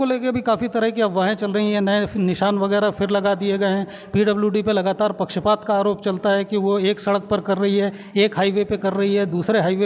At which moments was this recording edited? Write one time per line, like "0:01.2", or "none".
none